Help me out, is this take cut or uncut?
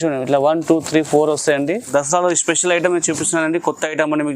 cut